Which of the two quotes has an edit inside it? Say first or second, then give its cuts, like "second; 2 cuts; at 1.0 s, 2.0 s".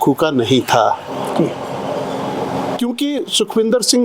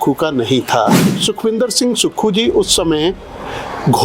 second; 1 cut; at 1.1 s